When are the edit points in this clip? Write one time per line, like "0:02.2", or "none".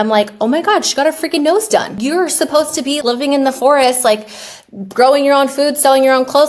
0:02.0
0:03.0

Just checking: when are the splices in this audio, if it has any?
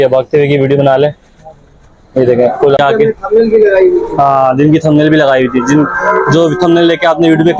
0:02.8

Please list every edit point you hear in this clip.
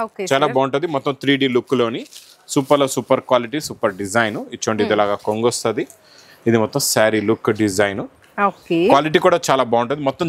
none

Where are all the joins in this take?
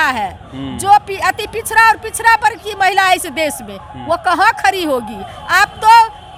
none

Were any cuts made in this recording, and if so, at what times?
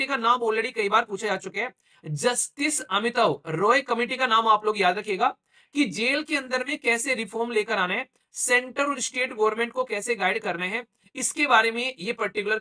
none

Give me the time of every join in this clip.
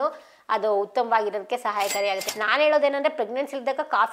0:02.2

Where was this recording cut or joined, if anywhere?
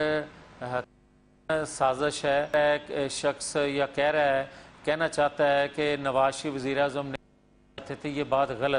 0:02.5

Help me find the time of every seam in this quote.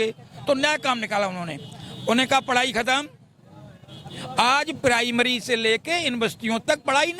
none

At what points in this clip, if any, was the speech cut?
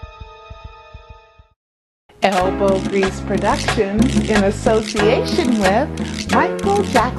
0:02.3

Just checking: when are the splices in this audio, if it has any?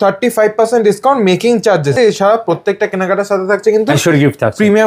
0:02.0

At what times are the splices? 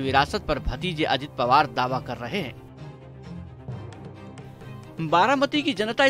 0:02.6
0:04.9

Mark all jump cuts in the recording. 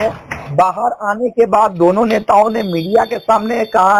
none

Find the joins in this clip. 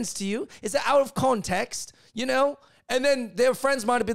none

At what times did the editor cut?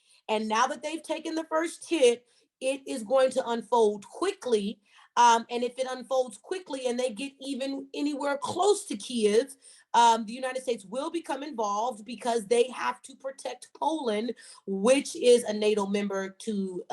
none

